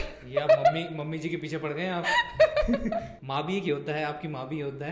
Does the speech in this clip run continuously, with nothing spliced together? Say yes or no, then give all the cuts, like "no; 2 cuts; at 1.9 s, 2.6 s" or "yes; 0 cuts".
no; 1 cut; at 3.2 s